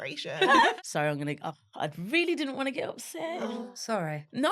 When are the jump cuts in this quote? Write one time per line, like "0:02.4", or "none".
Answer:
0:00.7
0:03.5